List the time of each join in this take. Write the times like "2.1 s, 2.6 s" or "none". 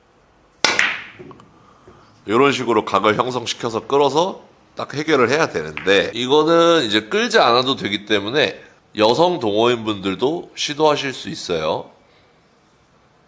6.2 s